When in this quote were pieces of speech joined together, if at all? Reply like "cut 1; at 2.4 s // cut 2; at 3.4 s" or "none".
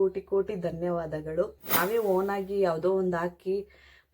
cut 1; at 1.8 s